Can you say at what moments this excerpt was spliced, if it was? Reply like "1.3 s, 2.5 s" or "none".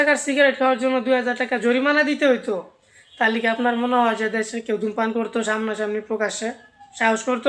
none